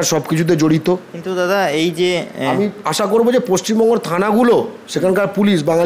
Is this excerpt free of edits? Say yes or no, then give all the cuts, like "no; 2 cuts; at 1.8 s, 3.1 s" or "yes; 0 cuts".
yes; 0 cuts